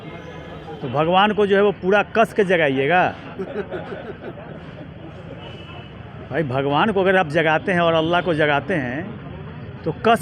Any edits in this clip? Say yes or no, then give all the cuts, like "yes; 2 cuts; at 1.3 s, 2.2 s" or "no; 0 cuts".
no; 0 cuts